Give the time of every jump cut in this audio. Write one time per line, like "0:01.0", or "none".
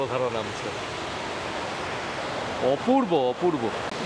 none